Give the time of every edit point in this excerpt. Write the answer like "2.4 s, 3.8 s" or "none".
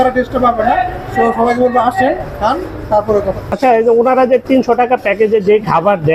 3.5 s